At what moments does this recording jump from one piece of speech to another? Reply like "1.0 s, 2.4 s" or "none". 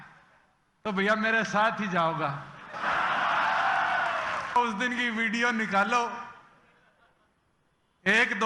4.6 s